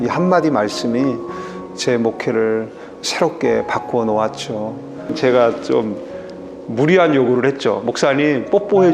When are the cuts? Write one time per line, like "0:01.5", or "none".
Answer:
0:05.2